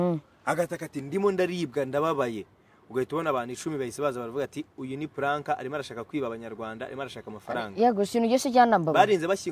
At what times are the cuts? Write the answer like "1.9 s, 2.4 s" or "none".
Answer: none